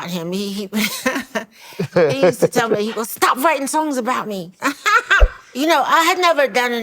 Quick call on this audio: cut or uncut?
cut